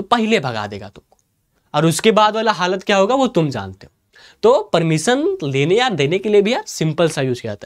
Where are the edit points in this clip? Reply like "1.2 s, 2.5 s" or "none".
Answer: none